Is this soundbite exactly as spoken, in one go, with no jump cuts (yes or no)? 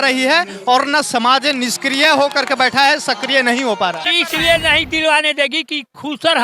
no